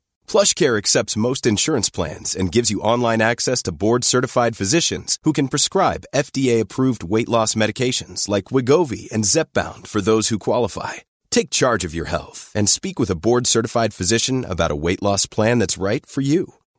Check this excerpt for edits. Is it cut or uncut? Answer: uncut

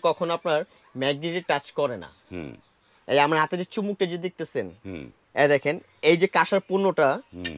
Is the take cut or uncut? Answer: uncut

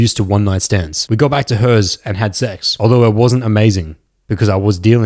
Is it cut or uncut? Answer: cut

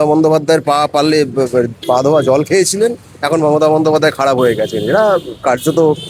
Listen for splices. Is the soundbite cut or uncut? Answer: uncut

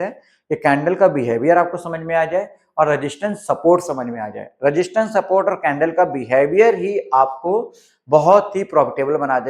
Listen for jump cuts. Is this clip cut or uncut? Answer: uncut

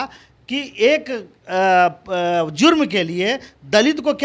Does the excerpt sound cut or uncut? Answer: uncut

